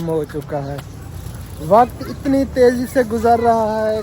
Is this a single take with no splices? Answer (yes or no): yes